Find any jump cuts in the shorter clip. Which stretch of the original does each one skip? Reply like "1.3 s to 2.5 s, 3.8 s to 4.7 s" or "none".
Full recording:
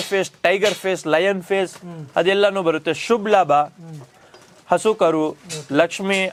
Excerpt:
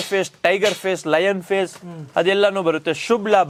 none